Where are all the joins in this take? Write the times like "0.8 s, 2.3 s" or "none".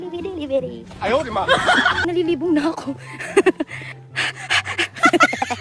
1.9 s